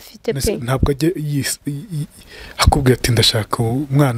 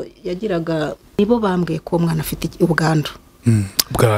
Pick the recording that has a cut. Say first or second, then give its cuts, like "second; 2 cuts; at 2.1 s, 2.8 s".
second; 1 cut; at 1.2 s